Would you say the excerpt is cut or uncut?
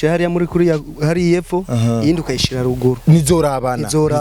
uncut